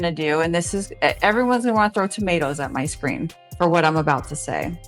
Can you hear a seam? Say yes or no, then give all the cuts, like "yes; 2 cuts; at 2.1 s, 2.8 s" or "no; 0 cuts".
no; 0 cuts